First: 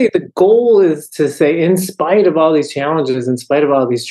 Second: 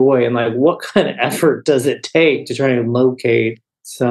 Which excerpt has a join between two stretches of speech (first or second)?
second